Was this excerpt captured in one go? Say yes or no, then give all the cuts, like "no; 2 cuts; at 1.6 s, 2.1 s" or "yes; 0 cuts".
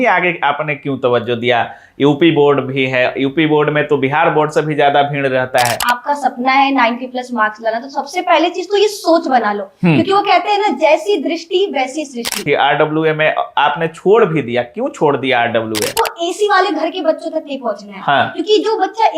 no; 3 cuts; at 5.9 s, 12.4 s, 15.9 s